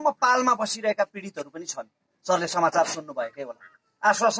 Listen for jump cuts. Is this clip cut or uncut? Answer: uncut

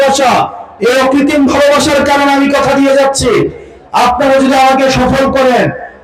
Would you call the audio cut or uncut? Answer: uncut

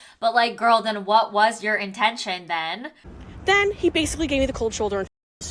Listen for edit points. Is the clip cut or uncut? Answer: cut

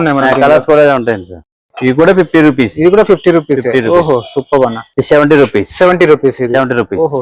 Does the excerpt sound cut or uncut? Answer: cut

